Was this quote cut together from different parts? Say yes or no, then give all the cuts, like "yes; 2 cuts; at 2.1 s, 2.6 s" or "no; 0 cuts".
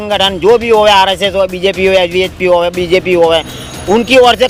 no; 0 cuts